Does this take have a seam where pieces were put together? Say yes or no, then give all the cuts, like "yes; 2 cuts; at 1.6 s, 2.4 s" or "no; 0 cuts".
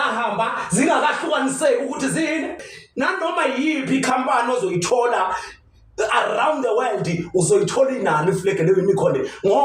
yes; 1 cut; at 2.8 s